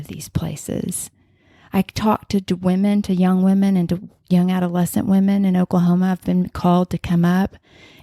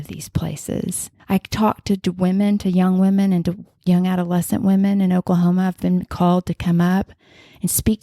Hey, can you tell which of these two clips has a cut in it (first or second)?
second